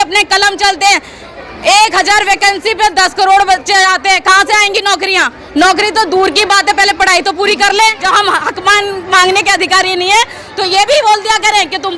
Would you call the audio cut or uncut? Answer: cut